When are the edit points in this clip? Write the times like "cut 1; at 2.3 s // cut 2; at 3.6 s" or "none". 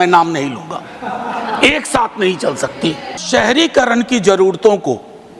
cut 1; at 3.2 s